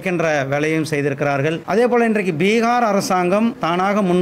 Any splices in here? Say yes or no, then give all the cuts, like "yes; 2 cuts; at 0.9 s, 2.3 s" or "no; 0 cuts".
yes; 1 cut; at 1.6 s